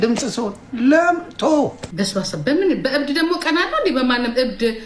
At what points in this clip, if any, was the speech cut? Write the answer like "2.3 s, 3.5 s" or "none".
1.8 s